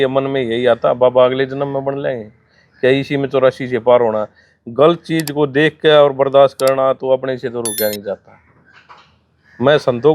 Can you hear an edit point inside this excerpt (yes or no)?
no